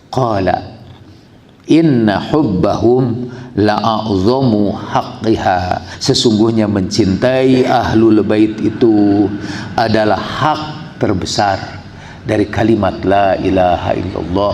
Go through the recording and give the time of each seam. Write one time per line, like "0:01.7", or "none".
0:05.9